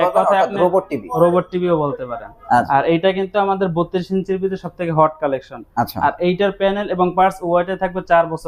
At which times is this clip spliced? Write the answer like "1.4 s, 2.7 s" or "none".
2.7 s